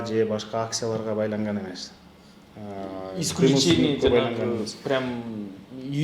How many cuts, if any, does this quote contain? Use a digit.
0